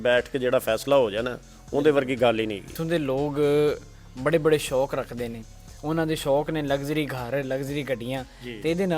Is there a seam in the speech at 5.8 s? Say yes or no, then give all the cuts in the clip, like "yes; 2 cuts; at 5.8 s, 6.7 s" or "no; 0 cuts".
no; 1 cut; at 2.8 s